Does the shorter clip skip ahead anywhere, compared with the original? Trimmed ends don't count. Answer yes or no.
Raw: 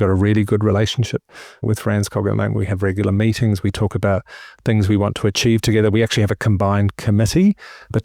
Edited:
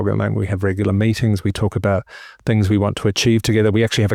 no